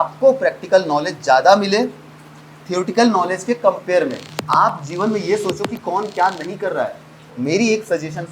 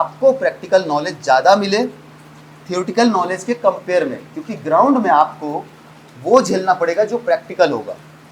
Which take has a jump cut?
first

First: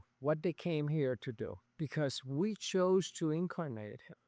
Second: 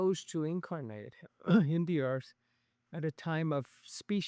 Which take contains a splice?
first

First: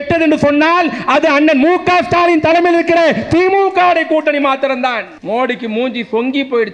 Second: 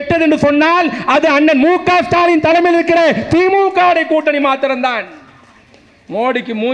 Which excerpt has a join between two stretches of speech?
first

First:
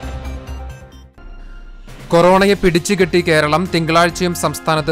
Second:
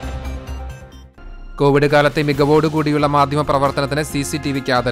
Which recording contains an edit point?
first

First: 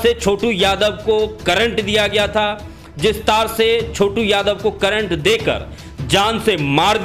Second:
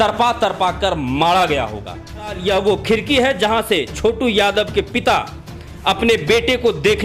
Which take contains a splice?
second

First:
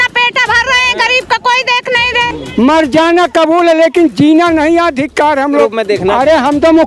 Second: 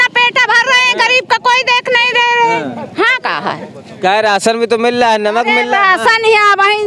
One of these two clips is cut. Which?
first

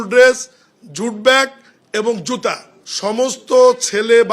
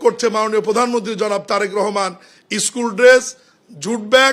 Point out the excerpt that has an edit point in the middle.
first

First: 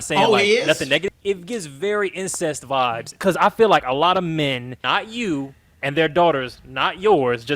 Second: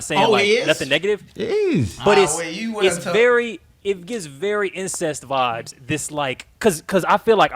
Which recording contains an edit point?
first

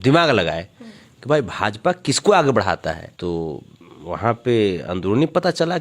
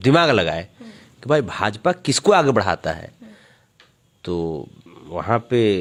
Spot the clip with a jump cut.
first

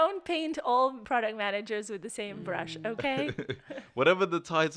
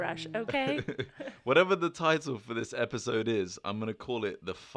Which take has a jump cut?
first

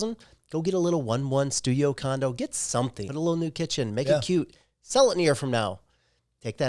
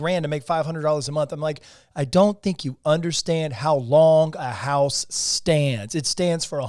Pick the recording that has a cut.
first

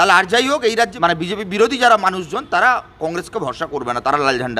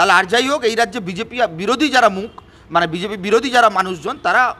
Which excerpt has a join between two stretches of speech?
first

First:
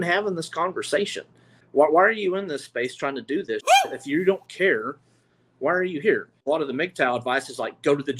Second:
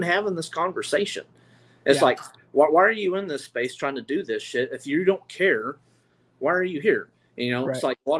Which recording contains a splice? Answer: first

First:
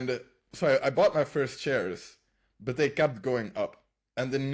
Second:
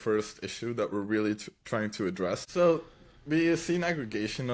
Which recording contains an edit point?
second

